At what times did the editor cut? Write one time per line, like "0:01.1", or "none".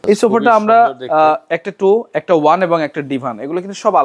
none